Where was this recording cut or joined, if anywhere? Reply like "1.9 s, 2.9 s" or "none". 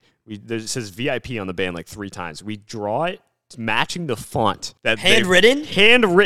4.7 s